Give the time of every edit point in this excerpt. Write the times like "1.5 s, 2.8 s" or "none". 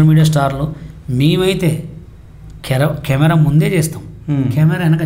none